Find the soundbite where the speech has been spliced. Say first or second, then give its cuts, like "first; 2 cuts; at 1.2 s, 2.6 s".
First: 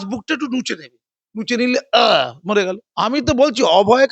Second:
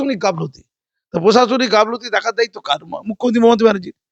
first; 1 cut; at 2.8 s